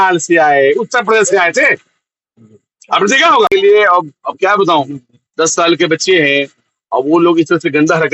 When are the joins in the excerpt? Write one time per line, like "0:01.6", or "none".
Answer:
0:03.5